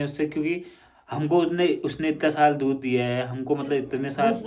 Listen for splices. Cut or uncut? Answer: uncut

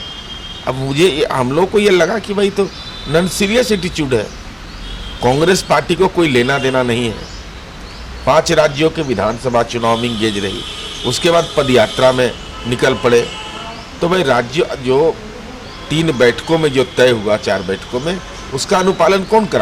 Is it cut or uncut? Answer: uncut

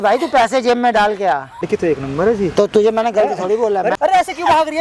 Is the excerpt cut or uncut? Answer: cut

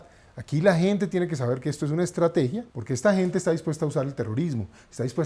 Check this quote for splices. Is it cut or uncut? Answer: cut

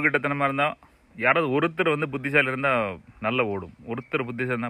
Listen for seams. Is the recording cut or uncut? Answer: uncut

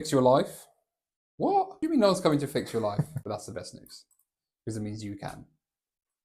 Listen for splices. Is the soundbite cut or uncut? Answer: cut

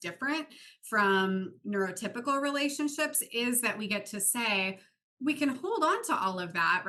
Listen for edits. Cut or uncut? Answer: uncut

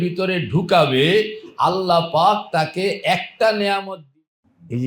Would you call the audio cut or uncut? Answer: cut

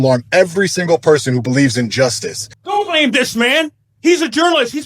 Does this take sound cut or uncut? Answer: cut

